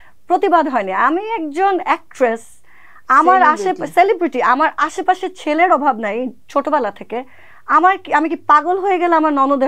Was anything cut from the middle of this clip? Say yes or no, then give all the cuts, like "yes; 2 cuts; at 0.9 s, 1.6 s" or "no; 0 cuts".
no; 0 cuts